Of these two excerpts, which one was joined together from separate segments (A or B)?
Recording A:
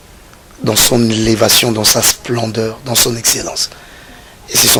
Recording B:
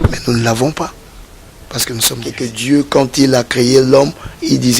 B